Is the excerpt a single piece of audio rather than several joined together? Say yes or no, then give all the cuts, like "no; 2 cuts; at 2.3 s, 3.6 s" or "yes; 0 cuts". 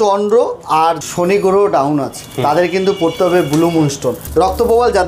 no; 2 cuts; at 1.0 s, 4.2 s